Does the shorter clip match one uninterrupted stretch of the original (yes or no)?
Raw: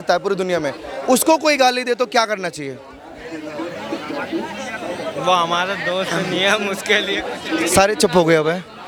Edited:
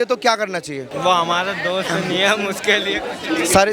no